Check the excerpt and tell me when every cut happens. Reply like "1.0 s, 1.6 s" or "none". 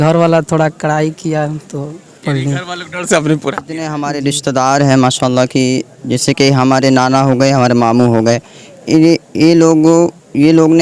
3.9 s